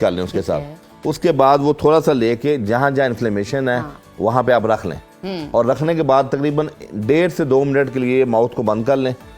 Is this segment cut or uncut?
uncut